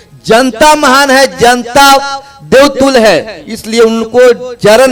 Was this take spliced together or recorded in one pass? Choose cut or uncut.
uncut